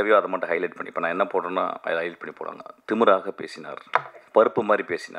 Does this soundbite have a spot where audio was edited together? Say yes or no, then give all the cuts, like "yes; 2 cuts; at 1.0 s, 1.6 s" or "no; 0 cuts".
yes; 1 cut; at 4.2 s